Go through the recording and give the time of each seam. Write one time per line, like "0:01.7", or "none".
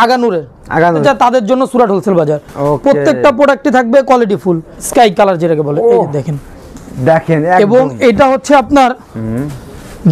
0:01.0
0:04.8